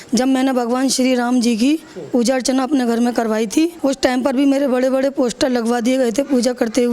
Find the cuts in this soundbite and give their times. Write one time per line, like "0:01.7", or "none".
0:03.8